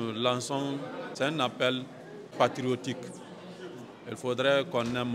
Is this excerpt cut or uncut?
cut